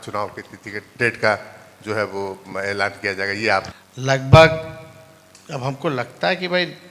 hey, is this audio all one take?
no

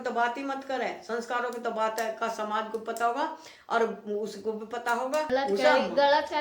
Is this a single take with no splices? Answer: no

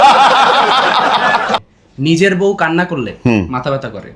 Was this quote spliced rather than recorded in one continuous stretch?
yes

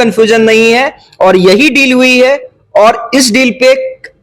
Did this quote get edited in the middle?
no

